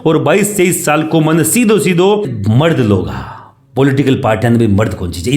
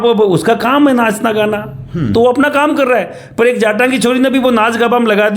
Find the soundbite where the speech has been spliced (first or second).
first